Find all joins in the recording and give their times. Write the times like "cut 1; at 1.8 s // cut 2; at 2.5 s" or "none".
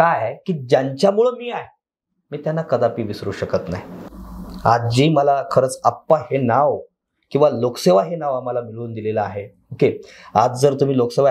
none